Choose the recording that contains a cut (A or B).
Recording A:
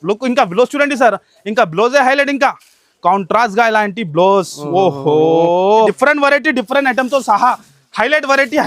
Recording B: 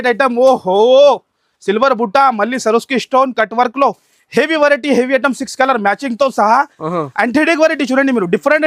A